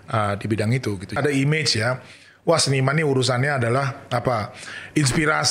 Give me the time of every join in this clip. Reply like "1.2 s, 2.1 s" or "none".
1.2 s